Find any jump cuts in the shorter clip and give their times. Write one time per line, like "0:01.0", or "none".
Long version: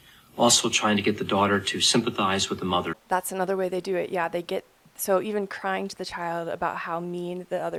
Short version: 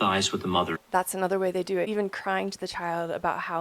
0:01.9